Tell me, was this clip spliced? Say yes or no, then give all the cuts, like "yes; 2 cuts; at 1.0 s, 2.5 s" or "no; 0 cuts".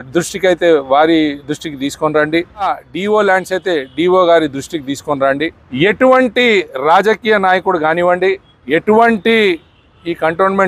yes; 3 cuts; at 2.8 s, 5.6 s, 8.5 s